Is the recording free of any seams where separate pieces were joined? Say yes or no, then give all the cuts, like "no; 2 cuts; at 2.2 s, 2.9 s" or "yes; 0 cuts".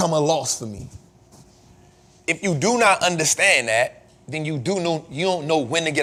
yes; 0 cuts